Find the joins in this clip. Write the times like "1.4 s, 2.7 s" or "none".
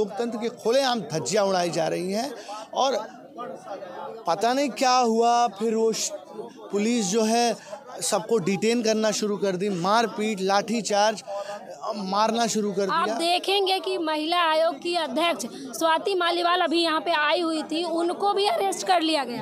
none